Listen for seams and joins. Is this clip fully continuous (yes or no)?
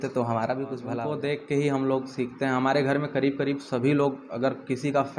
no